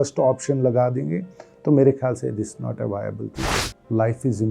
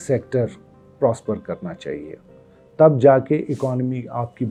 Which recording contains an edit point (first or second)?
first